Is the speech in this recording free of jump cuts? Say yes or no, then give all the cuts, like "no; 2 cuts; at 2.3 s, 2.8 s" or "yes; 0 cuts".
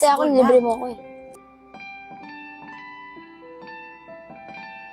no; 1 cut; at 1.4 s